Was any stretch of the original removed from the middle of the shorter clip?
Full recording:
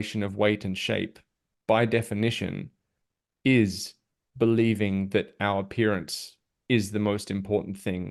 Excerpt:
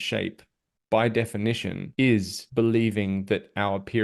yes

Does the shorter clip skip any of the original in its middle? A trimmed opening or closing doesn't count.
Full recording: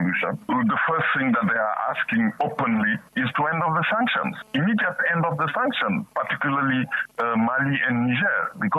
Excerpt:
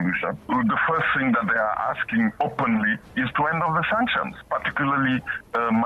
yes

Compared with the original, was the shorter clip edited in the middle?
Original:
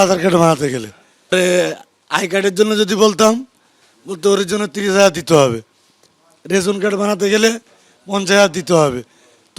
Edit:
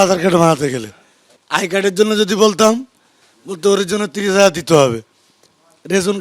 yes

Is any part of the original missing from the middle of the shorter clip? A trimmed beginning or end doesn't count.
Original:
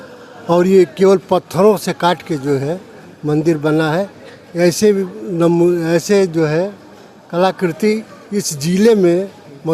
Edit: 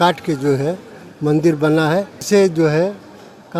yes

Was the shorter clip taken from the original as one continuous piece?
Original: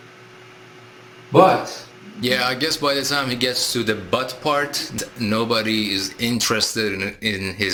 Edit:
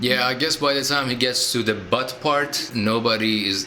no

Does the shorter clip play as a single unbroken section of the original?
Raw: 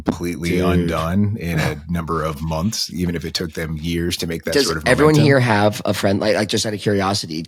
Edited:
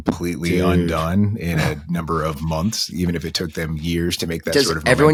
yes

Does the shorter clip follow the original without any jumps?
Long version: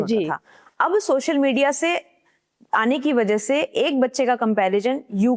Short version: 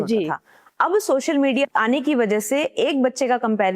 no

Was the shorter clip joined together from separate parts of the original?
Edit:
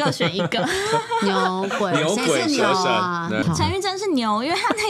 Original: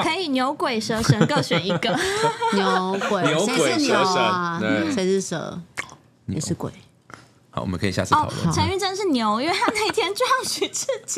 yes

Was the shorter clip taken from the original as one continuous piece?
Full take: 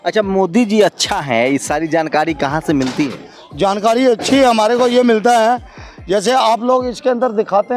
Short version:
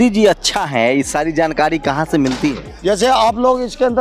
no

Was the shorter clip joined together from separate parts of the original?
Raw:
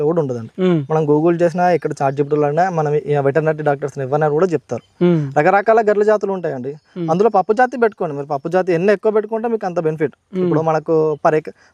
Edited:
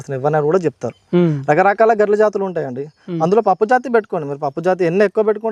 no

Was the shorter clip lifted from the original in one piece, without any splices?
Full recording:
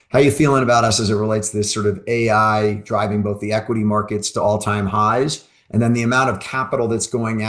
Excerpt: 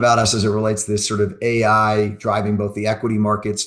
yes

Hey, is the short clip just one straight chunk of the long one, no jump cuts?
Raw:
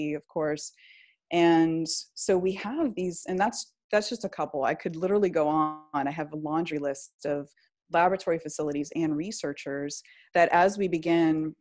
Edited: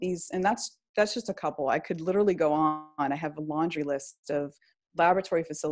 yes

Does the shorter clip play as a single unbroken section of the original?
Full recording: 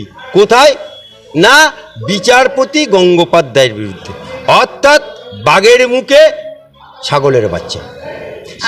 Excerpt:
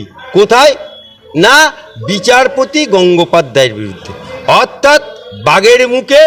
yes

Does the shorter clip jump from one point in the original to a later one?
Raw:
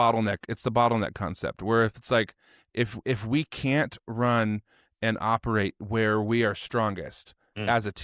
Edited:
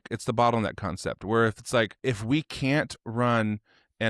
yes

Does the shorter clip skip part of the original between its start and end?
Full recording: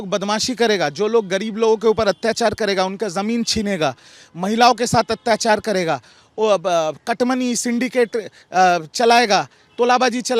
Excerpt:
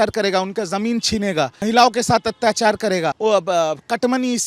yes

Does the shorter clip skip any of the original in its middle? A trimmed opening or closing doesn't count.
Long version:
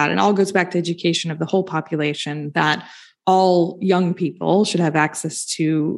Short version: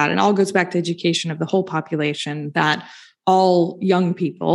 no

